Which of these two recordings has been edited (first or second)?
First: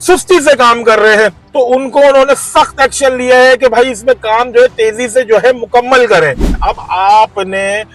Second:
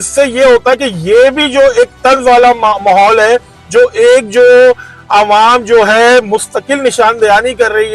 first